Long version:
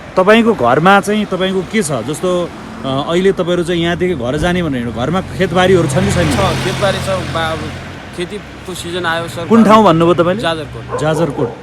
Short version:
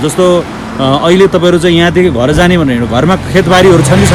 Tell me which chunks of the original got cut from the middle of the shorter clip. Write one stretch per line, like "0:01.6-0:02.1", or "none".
none